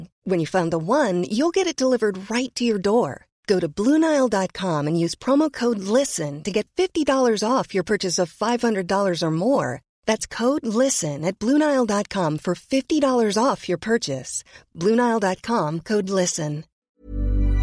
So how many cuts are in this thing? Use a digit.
1